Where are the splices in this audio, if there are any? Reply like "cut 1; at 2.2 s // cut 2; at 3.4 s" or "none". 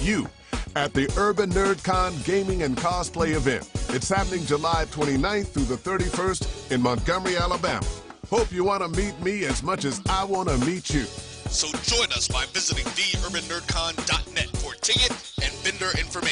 none

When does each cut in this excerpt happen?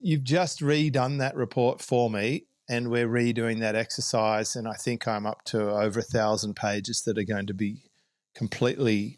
none

